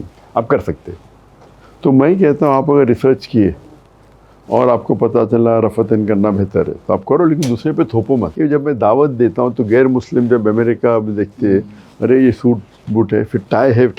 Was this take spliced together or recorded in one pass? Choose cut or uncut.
cut